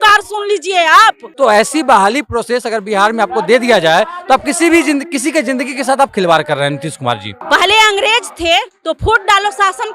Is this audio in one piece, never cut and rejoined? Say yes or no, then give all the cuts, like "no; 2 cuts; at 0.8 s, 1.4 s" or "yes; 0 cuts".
no; 2 cuts; at 1.3 s, 7.3 s